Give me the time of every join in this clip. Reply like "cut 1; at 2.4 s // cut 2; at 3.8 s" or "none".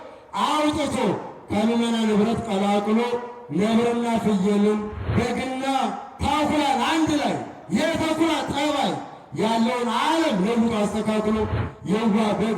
cut 1; at 5.0 s